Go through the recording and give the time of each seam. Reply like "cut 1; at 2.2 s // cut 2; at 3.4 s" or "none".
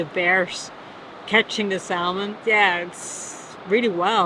cut 1; at 2.3 s